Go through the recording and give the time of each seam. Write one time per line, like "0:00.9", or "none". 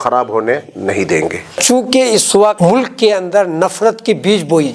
0:01.5
0:02.6